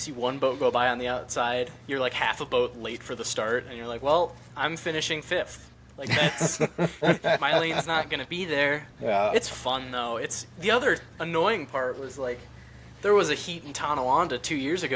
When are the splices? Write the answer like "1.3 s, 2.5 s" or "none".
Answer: none